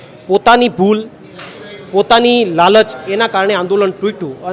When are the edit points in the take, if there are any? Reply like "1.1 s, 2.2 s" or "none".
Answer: none